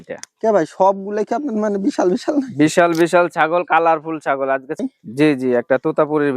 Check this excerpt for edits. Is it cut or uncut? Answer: cut